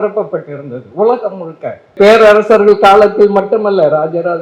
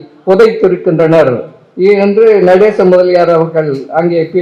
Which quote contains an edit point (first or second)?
first